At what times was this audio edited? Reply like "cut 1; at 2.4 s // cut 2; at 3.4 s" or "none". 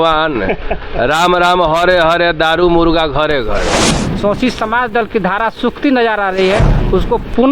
cut 1; at 3.8 s